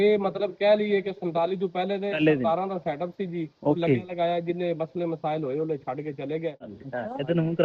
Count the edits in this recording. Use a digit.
1